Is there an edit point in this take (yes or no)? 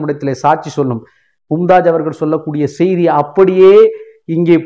no